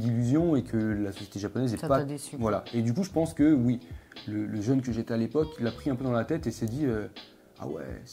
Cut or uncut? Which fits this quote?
uncut